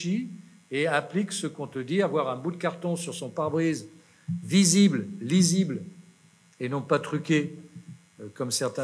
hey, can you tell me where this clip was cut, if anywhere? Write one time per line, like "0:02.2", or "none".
none

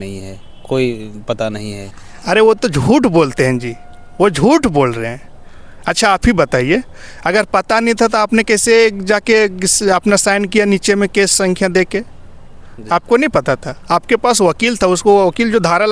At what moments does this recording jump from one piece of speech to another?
none

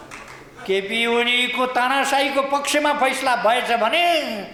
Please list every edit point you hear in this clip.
none

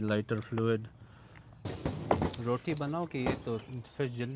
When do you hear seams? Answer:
0:01.6

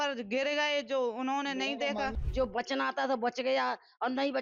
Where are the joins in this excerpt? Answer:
0:02.1

